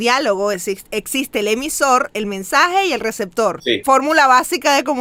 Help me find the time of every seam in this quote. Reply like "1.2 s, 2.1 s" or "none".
none